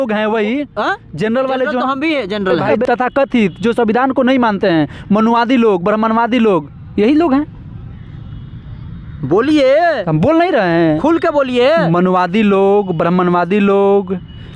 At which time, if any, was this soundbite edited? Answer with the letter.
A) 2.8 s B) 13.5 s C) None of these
C